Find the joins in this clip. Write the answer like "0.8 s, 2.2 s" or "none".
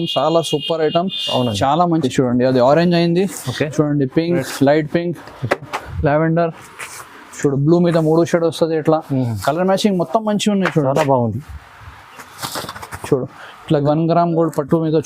2.0 s, 13.8 s